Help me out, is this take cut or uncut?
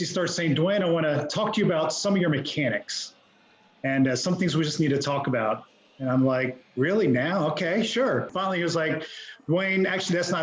cut